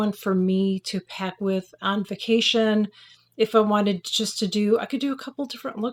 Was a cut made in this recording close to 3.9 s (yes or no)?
no